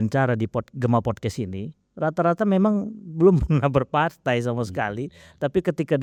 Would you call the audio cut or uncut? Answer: uncut